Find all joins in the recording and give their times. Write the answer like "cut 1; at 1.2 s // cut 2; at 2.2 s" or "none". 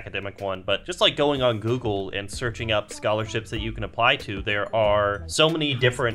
cut 1; at 0.9 s // cut 2; at 5.2 s